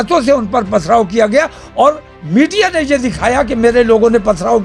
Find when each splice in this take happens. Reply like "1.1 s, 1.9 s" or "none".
none